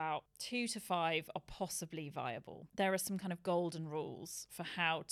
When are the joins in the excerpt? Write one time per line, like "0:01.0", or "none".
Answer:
0:02.6